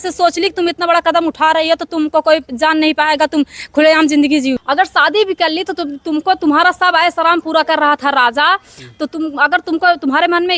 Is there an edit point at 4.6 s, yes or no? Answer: yes